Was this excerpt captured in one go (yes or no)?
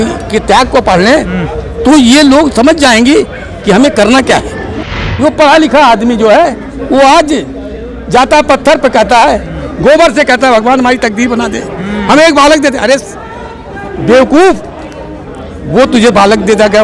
no